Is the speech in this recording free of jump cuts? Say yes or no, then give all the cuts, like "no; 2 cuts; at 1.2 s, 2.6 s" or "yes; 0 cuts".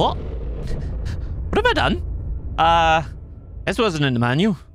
yes; 0 cuts